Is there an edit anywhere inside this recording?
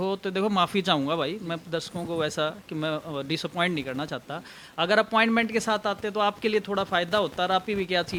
no; 0 cuts

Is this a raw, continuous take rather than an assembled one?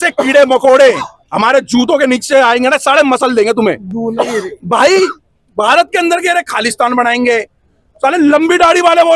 yes; 0 cuts

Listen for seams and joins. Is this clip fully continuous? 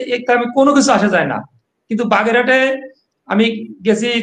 yes; 0 cuts

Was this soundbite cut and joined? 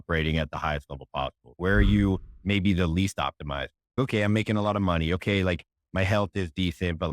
yes; 1 cut; at 1.5 s

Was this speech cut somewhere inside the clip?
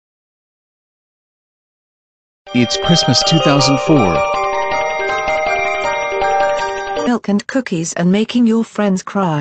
no; 0 cuts

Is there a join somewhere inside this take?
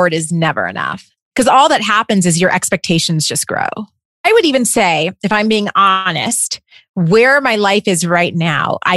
no; 0 cuts

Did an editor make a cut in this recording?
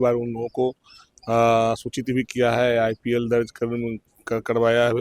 no; 0 cuts

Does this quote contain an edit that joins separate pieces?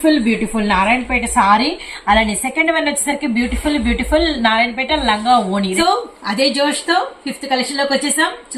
yes; 1 cut; at 5.7 s

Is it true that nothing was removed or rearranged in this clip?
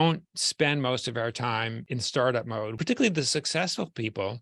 no; 2 cuts; at 1.8 s, 2.8 s

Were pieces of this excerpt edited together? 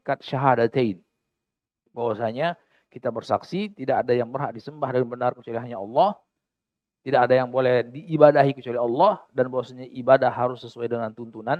no; 0 cuts

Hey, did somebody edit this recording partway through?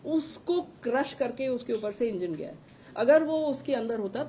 no; 0 cuts

